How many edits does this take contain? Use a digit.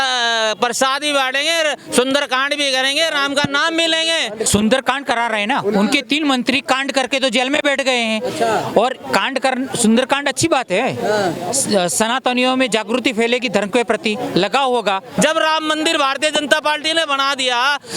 2